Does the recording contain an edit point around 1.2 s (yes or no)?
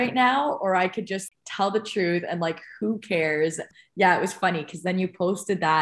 yes